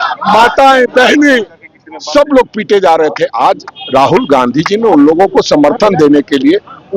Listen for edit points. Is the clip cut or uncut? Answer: uncut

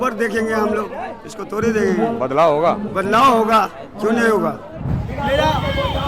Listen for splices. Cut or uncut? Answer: cut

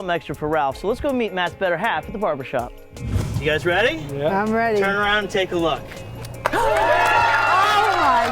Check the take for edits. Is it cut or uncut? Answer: cut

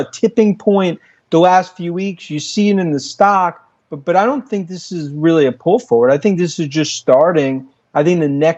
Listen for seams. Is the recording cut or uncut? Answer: uncut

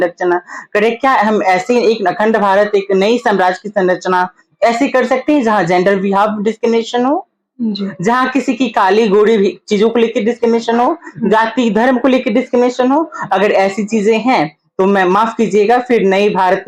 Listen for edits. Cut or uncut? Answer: uncut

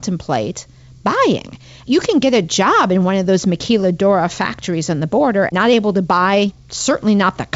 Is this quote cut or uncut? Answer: cut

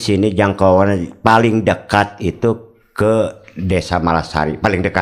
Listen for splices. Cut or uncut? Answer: uncut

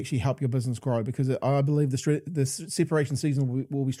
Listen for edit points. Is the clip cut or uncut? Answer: uncut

